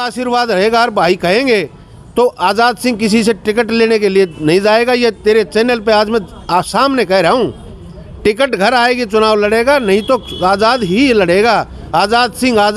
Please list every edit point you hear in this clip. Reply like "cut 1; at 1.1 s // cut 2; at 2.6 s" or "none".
none